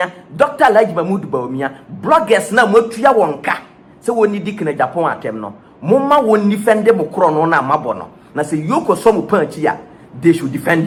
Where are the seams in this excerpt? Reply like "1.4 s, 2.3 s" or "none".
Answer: none